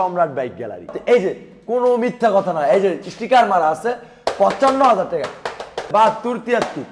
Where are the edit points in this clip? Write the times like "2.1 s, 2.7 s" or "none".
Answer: 1.0 s, 5.9 s